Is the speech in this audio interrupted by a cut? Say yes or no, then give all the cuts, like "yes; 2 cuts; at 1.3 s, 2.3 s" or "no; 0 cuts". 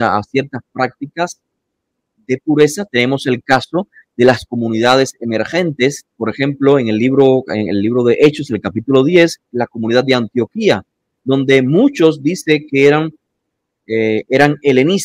no; 0 cuts